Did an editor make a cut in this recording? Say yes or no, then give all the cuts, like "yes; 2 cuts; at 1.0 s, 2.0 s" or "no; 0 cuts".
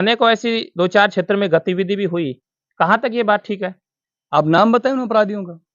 no; 0 cuts